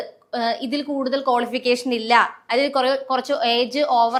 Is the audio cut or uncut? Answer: uncut